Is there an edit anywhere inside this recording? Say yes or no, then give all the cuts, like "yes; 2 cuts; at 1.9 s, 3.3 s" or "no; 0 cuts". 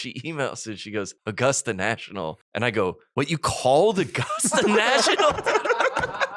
yes; 3 cuts; at 1.1 s, 2.4 s, 3.0 s